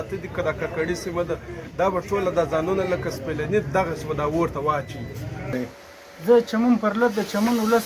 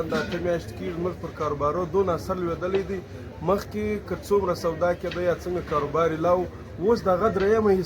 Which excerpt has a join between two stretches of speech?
first; 1 cut; at 5.5 s

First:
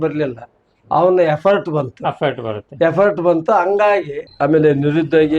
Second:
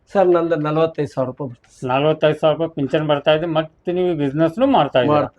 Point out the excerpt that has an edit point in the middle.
first; 1 cut; at 4.2 s

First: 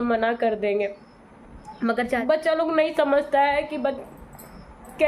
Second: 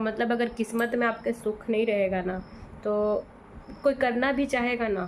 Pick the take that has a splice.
first; 1 cut; at 2.2 s

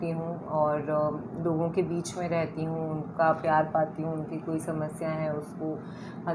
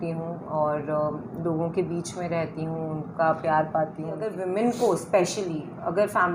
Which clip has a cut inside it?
second; 1 cut; at 4.3 s

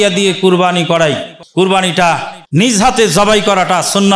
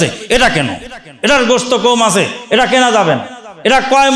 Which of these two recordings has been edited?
first; 2 cuts; at 1.3 s, 2.7 s

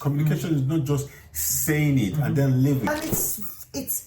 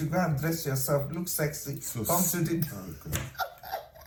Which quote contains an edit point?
first; 1 cut; at 2.9 s

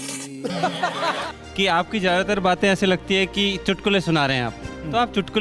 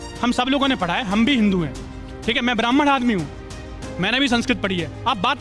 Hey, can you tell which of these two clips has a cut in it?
first; 1 cut; at 1.3 s

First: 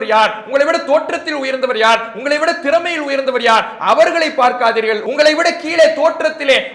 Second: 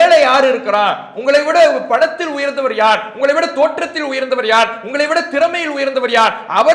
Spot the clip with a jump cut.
first; 1 cut; at 5.0 s

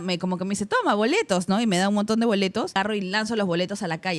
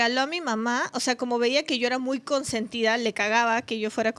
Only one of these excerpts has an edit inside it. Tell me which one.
first; 1 cut; at 2.8 s

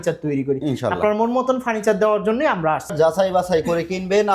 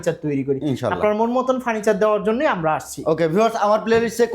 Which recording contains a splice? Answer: first; 1 cut; at 2.9 s

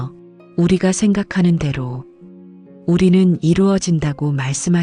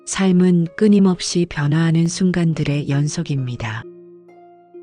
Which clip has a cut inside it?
second; 1 cut; at 3.8 s

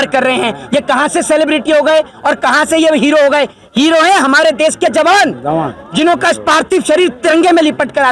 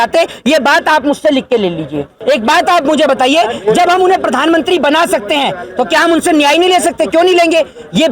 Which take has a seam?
second; 1 cut; at 2.1 s

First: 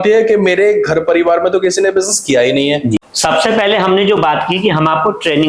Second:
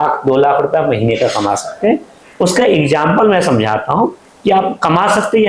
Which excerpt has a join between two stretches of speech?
first; 1 cut; at 3.1 s

